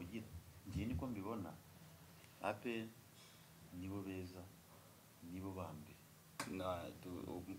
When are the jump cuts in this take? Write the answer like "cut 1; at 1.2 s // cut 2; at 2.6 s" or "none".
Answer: cut 1; at 6.4 s